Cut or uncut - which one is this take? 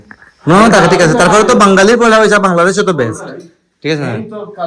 uncut